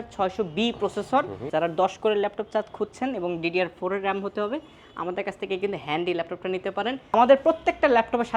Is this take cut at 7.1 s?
yes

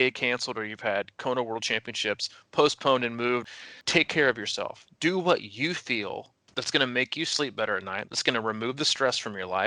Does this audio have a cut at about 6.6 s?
yes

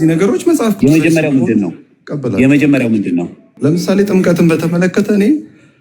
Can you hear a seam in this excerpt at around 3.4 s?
yes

